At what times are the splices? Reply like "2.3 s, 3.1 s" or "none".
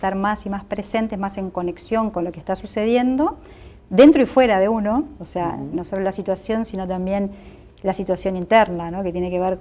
3.3 s